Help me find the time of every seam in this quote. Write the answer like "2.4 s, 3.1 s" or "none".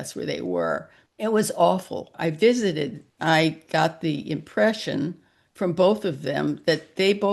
1.0 s, 2.1 s, 3.1 s